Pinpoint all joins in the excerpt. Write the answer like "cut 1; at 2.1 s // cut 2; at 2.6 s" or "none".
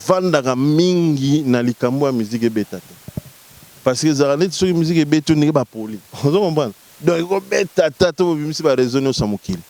none